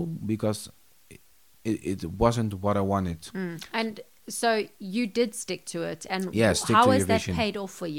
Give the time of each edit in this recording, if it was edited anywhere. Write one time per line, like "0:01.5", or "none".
none